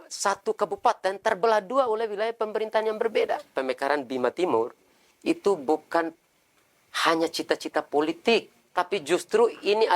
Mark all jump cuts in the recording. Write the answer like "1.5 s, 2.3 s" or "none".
3.5 s, 8.6 s